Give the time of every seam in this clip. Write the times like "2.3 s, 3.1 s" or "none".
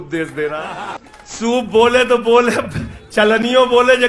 0.9 s